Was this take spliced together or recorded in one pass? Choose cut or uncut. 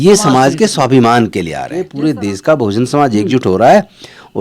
cut